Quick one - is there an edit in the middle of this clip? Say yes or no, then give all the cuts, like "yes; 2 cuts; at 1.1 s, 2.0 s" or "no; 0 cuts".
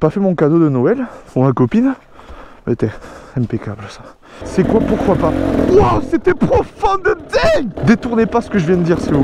yes; 2 cuts; at 4.4 s, 7.7 s